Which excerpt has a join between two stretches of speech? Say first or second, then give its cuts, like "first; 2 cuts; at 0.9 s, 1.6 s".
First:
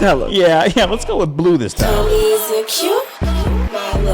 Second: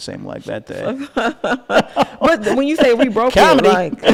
first; 1 cut; at 1.8 s